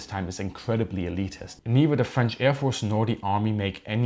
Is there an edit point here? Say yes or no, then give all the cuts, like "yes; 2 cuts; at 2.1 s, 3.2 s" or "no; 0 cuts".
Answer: yes; 1 cut; at 1.6 s